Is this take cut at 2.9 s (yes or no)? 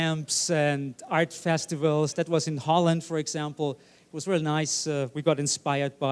no